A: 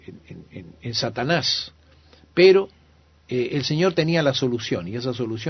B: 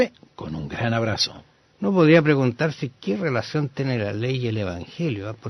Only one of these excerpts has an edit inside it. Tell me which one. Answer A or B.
B